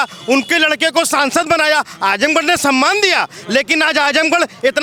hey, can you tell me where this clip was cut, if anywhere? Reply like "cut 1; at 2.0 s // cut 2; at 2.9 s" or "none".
none